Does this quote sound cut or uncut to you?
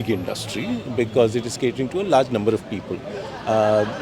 uncut